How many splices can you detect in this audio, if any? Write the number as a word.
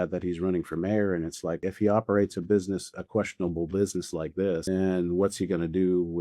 two